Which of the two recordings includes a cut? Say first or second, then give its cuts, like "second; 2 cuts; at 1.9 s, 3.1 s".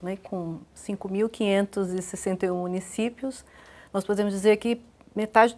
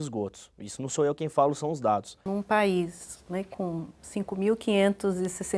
second; 1 cut; at 2.3 s